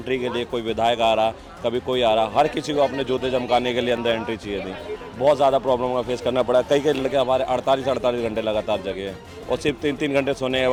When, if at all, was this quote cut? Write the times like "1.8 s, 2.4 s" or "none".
none